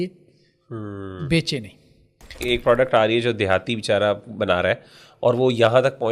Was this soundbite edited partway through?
yes; 1 cut; at 2.4 s

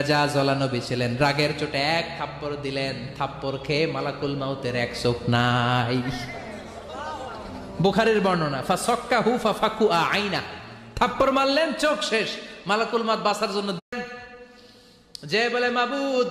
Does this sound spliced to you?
yes; 1 cut; at 13.8 s

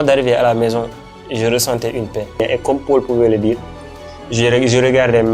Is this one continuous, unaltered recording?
no; 1 cut; at 2.4 s

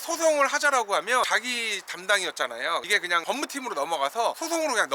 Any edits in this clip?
no; 0 cuts

